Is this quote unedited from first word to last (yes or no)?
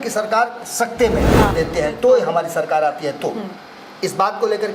no